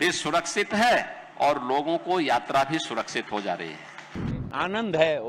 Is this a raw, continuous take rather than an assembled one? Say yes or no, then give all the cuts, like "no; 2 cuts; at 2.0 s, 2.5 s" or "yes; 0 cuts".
no; 1 cut; at 4.3 s